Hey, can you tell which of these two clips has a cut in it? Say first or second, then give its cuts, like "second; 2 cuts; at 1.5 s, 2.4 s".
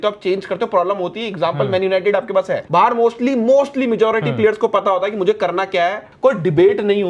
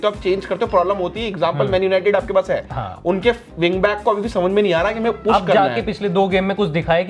first; 2 cuts; at 2.6 s, 6.1 s